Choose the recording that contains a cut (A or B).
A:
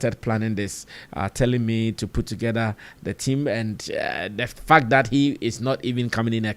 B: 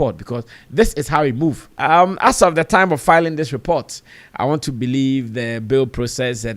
B